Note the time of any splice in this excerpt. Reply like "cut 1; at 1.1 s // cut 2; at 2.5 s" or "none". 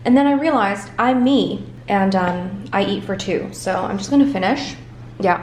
none